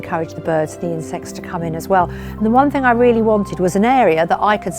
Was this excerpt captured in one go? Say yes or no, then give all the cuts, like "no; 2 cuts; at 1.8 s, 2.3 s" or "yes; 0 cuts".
yes; 0 cuts